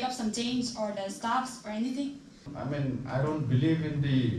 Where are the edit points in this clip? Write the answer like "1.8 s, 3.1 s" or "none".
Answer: 2.5 s